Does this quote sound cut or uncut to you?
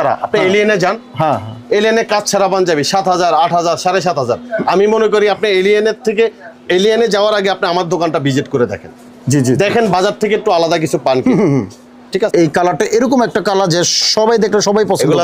cut